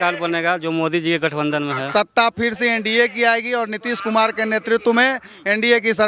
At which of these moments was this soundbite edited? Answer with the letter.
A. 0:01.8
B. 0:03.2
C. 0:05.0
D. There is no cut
A